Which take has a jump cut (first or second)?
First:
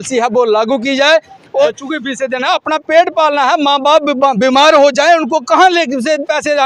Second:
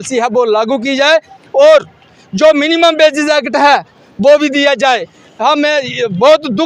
first